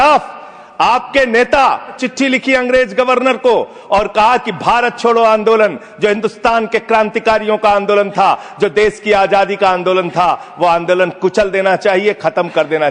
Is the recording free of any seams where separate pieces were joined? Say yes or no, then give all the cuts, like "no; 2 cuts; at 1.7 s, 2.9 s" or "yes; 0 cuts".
no; 1 cut; at 2.0 s